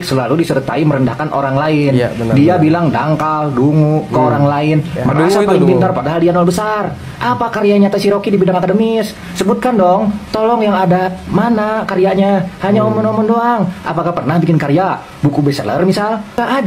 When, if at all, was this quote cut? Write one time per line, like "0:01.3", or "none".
none